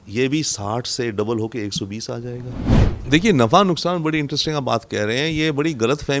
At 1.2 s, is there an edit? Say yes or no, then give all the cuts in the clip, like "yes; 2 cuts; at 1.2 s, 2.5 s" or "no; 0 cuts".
no; 1 cut; at 3.0 s